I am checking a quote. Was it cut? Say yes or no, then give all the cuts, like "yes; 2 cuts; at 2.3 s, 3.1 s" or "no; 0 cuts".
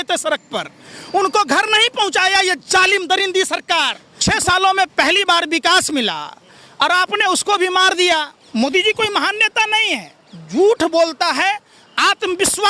yes; 2 cuts; at 4.0 s, 8.4 s